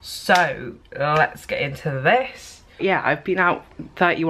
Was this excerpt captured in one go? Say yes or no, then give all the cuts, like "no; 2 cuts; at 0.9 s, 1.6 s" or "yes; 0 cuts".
no; 1 cut; at 2.8 s